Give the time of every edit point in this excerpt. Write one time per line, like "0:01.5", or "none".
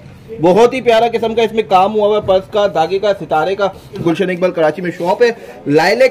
0:04.0